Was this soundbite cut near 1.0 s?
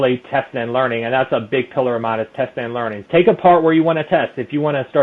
no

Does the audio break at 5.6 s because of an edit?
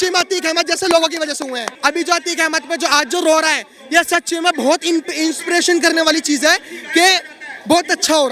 no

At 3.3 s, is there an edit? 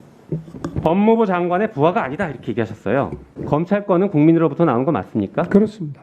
yes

